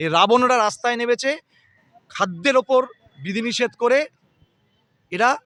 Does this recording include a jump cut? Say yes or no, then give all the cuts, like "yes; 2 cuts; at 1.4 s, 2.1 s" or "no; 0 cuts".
no; 0 cuts